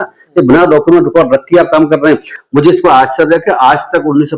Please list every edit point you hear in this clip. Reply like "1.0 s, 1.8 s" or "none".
2.3 s